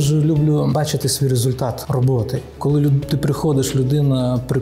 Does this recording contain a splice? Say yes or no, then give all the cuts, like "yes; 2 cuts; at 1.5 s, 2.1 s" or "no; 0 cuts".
yes; 2 cuts; at 0.7 s, 1.8 s